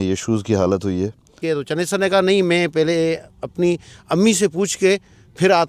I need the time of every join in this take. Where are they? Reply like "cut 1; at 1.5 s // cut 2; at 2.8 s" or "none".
cut 1; at 1.3 s